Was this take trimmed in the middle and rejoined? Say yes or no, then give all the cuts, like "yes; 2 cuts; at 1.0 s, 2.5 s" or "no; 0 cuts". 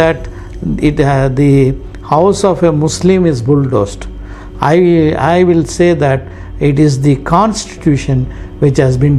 no; 0 cuts